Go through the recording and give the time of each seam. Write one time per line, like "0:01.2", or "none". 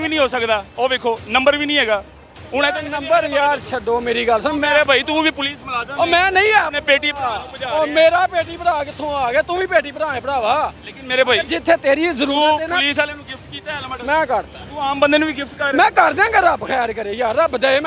none